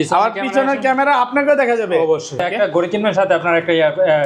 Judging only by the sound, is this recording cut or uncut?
cut